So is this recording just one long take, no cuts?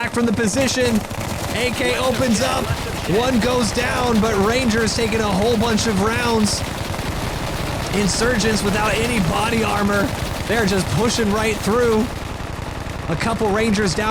yes; 0 cuts

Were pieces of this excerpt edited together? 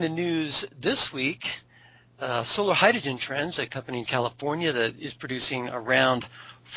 yes; 1 cut; at 3.7 s

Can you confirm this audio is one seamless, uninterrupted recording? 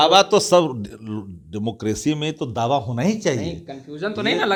yes; 0 cuts

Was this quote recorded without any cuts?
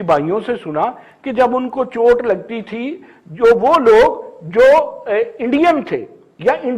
yes; 0 cuts

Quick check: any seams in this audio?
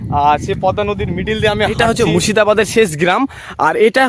yes; 1 cut; at 1.8 s

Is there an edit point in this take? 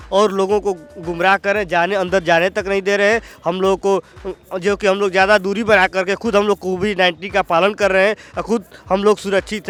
no; 0 cuts

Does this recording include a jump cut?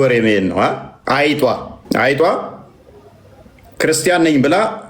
yes; 2 cuts; at 0.9 s, 1.7 s

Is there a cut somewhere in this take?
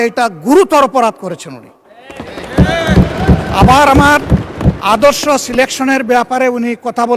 no; 0 cuts

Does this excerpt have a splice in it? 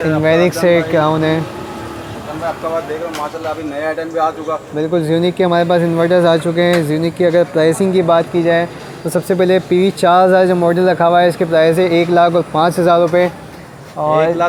no; 0 cuts

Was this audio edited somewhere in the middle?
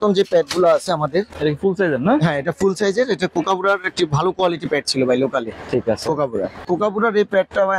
yes; 2 cuts; at 1.3 s, 6.6 s

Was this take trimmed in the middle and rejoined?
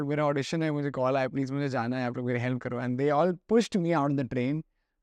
no; 0 cuts

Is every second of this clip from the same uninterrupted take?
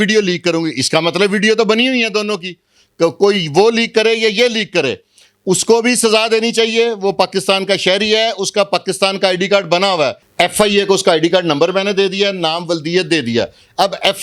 no; 1 cut; at 10.2 s

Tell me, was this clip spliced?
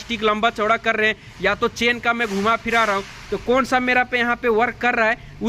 no; 0 cuts

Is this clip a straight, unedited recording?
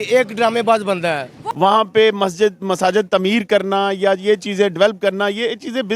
no; 1 cut; at 1.4 s

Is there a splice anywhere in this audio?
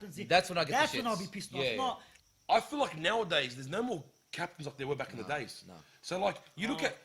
yes; 1 cut; at 2.1 s

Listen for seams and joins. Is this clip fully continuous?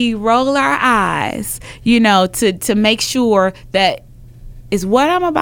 yes; 0 cuts

